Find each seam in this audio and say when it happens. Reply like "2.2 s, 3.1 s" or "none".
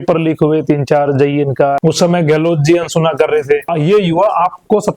1.8 s, 3.7 s